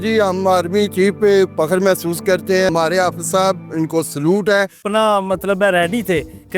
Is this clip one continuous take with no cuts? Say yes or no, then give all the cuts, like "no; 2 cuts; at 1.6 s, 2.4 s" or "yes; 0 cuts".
no; 2 cuts; at 2.7 s, 4.8 s